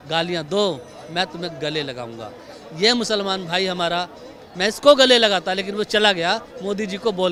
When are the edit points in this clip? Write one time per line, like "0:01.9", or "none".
none